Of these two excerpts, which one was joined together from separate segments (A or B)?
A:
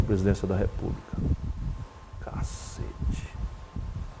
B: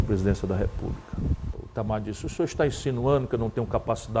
B